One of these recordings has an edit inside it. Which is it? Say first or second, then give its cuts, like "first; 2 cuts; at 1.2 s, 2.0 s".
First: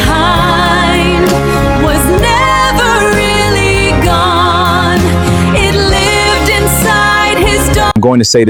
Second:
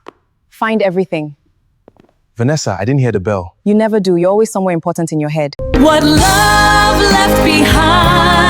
second; 1 cut; at 5.7 s